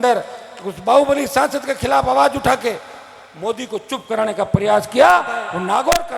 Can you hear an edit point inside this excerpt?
no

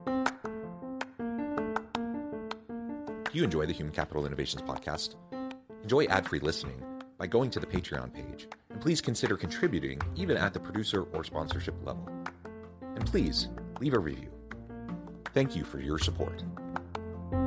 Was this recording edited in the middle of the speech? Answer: no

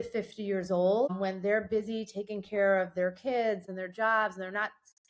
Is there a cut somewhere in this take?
yes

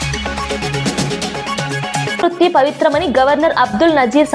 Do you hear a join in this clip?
yes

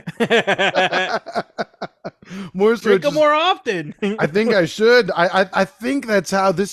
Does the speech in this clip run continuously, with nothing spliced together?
no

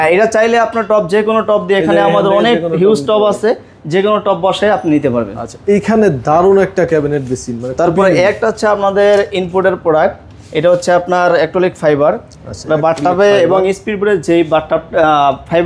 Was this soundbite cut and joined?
no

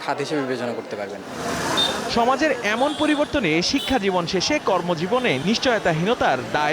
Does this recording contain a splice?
no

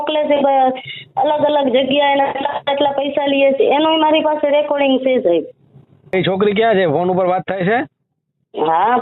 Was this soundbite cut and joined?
yes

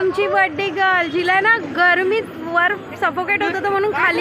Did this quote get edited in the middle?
no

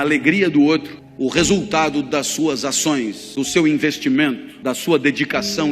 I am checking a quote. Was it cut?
yes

